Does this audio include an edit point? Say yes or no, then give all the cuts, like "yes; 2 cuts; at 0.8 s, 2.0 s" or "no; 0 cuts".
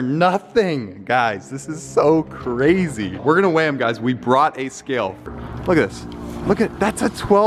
no; 0 cuts